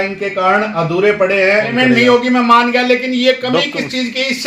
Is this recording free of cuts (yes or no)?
no